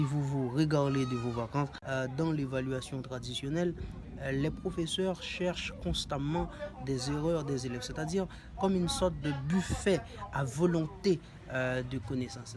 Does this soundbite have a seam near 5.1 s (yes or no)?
no